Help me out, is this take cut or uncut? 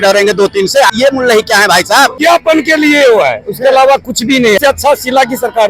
cut